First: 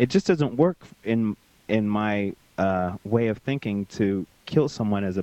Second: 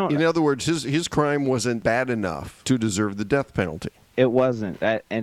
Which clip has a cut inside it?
second; 2 cuts; at 1.9 s, 4.1 s

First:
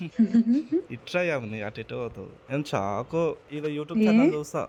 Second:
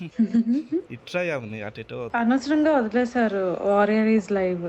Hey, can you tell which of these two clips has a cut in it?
second; 1 cut; at 2.1 s

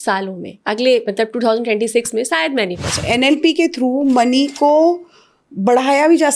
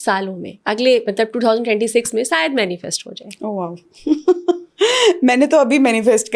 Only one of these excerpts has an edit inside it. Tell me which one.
first; 1 cut; at 3.0 s

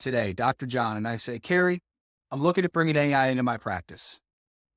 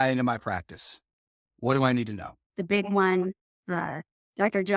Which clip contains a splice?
second; 1 cut; at 2.5 s

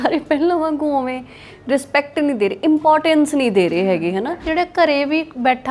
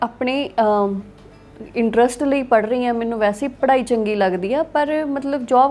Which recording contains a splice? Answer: first; 1 cut; at 4.5 s

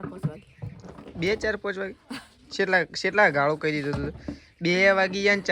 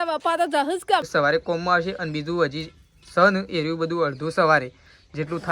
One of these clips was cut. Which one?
second; 1 cut; at 1.0 s

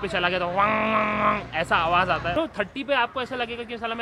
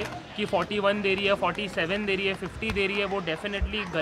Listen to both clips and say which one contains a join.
first; 1 cut; at 2.4 s

